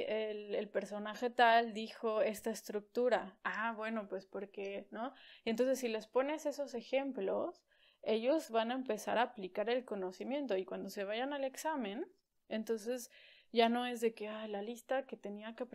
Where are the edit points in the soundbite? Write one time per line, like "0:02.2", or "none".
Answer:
none